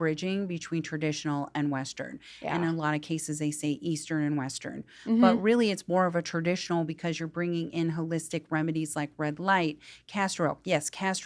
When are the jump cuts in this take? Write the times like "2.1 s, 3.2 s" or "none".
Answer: none